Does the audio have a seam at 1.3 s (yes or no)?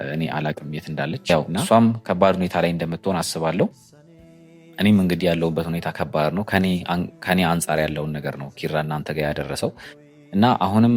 yes